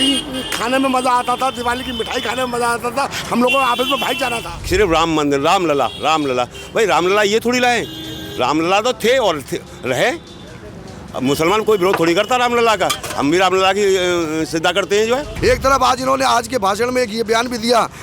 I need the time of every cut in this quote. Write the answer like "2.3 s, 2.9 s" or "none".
4.5 s, 15.3 s